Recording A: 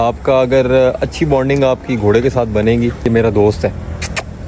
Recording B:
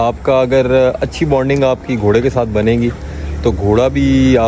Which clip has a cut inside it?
A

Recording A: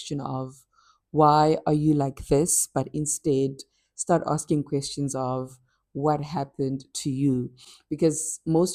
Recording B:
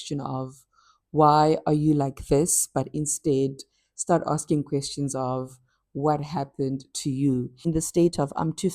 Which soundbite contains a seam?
B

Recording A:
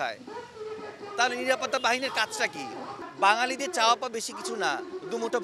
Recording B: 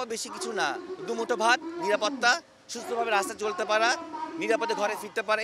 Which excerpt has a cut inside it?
A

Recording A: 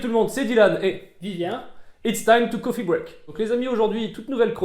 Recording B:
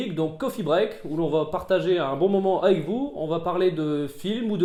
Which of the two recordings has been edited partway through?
A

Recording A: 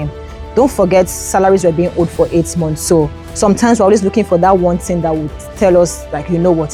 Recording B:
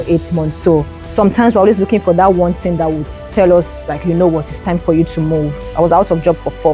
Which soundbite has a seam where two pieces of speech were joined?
B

